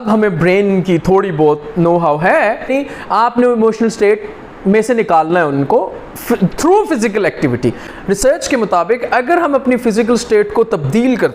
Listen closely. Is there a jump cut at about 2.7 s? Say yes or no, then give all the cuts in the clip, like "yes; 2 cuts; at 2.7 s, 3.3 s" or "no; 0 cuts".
yes; 2 cuts; at 2.7 s, 7.8 s